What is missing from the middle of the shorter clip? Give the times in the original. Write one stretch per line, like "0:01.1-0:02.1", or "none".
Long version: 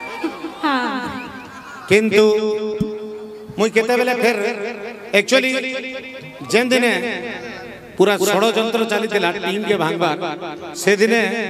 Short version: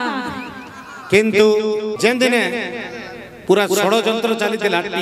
0:02.7-0:06.4